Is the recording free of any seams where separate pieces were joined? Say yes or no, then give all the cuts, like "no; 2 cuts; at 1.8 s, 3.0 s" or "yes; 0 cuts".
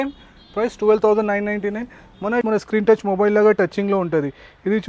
no; 1 cut; at 2.4 s